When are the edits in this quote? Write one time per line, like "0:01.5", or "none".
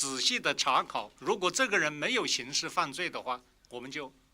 0:01.1

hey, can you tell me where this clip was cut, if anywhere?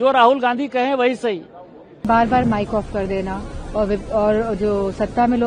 0:02.1

